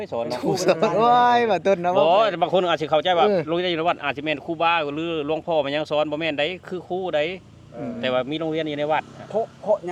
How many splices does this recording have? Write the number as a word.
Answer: zero